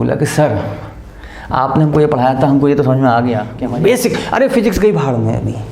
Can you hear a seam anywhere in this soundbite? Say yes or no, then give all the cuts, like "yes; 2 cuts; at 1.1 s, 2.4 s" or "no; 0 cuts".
yes; 1 cut; at 3.6 s